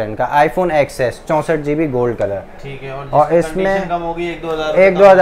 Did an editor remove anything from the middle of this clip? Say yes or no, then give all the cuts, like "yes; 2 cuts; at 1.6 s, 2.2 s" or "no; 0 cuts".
no; 0 cuts